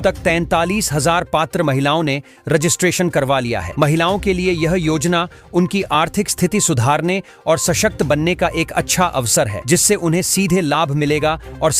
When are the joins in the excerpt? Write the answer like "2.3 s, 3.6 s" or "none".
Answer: none